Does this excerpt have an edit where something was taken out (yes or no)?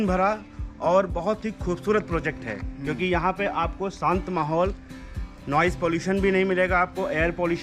no